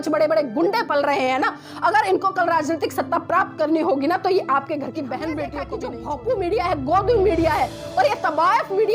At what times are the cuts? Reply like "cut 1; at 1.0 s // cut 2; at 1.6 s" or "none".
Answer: cut 1; at 5.7 s